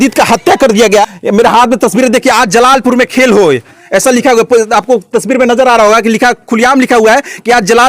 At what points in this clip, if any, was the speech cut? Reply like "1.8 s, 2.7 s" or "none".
1.1 s